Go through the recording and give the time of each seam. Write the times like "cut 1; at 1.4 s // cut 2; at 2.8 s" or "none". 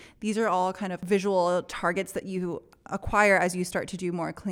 cut 1; at 1.0 s